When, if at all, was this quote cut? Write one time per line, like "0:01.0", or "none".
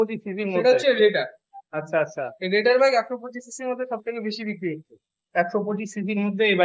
none